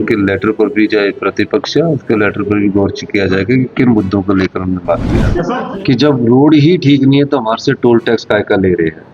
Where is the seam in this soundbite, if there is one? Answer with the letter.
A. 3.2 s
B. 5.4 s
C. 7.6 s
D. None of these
B